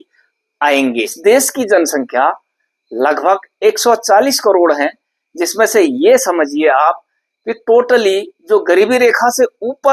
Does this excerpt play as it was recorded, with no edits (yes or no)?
no